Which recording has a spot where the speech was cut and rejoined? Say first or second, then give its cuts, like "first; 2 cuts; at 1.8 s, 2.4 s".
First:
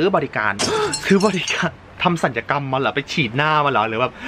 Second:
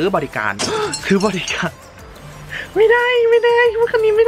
first; 1 cut; at 1.9 s